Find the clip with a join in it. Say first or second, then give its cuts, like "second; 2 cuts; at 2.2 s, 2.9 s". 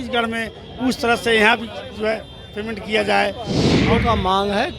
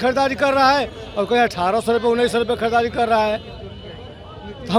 first; 1 cut; at 3.9 s